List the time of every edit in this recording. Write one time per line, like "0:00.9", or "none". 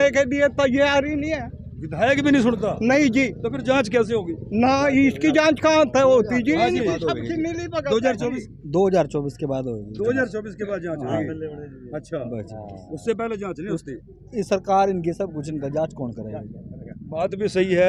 none